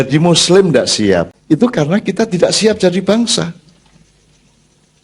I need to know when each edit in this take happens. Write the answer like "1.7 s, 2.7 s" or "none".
1.3 s